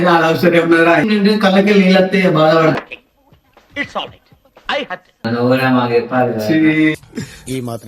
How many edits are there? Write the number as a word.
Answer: two